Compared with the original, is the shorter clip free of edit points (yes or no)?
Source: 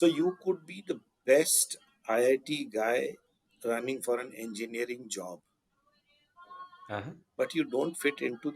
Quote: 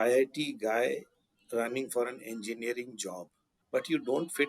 no